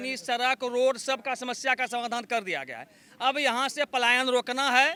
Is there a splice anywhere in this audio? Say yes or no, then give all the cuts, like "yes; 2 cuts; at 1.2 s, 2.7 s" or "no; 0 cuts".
no; 0 cuts